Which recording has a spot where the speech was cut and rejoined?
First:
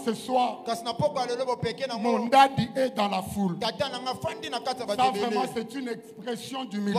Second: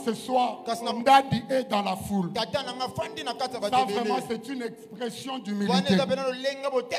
second; 1 cut; at 0.9 s

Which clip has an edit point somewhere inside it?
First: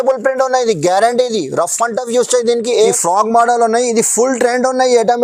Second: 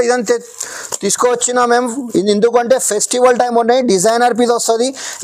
first; 1 cut; at 2.7 s

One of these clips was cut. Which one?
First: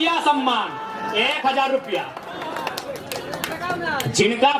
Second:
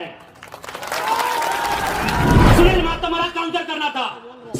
second; 1 cut; at 2.5 s

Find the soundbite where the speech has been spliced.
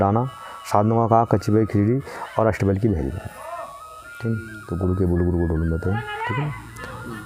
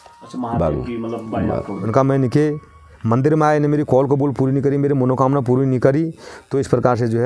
second; 1 cut; at 1.8 s

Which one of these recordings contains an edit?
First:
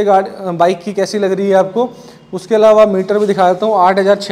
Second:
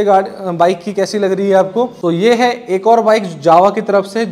second; 1 cut; at 2.0 s

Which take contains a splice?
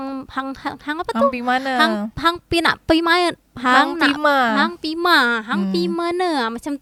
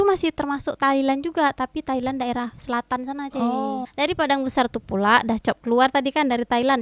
second; 1 cut; at 3.9 s

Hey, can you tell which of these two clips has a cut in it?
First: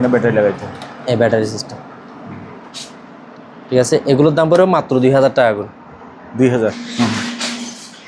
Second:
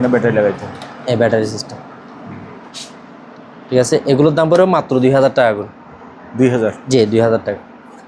first; 1 cut; at 6.8 s

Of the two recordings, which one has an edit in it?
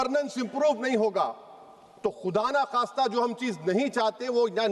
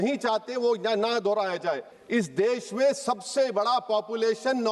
second; 1 cut; at 1.9 s

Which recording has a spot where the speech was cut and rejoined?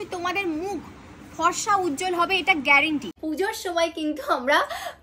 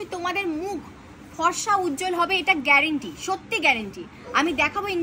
first; 1 cut; at 3.2 s

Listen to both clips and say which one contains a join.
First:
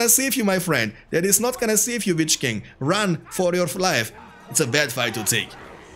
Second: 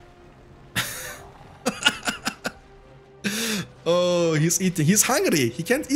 first; 1 cut; at 4.1 s

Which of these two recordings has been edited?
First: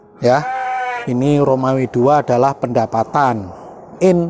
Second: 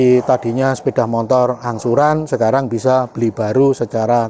first; 1 cut; at 1.0 s

